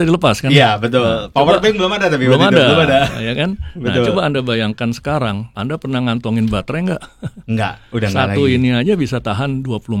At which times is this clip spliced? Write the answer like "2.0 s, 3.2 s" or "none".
5.5 s